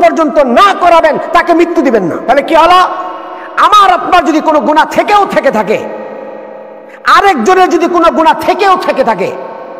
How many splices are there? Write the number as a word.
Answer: one